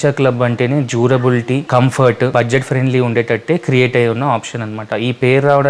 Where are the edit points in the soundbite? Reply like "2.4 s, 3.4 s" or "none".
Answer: 1.6 s, 2.3 s